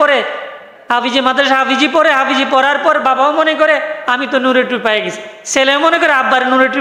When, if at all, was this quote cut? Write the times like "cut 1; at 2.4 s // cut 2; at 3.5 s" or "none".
none